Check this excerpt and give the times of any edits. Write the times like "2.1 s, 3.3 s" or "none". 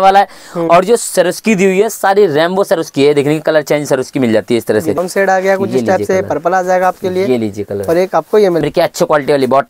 5.0 s, 8.6 s